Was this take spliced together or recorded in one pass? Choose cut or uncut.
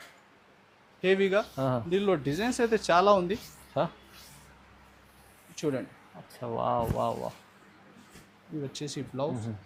uncut